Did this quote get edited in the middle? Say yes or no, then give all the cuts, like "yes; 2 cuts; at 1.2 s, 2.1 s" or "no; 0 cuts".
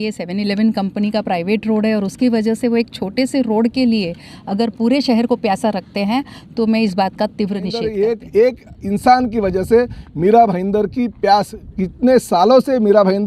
yes; 1 cut; at 7.7 s